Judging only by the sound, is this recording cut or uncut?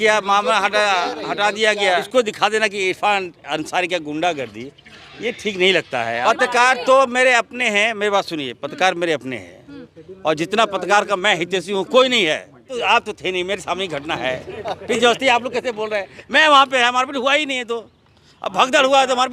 cut